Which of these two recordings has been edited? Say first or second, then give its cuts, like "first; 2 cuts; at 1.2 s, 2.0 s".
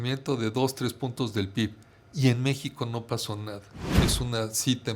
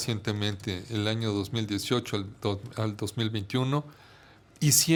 first; 1 cut; at 4.0 s